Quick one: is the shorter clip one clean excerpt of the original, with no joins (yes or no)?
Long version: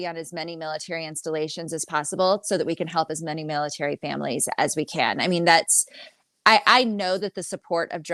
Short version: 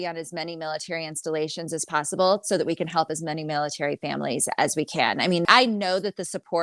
no